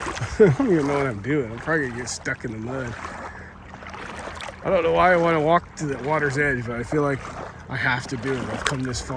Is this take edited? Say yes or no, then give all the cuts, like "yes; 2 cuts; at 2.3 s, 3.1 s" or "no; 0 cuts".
no; 0 cuts